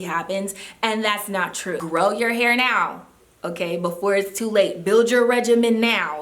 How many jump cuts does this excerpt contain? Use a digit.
1